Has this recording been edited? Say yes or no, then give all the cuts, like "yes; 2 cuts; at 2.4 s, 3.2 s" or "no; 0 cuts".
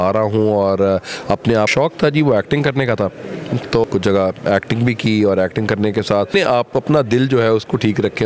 yes; 3 cuts; at 1.7 s, 3.8 s, 6.3 s